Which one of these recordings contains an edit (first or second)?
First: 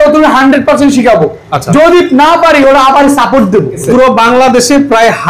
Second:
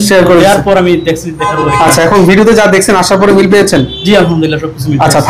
first